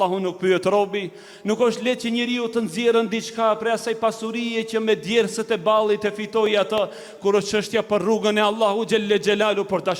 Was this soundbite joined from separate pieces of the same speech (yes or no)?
no